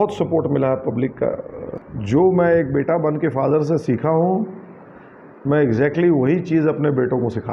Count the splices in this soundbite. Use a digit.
1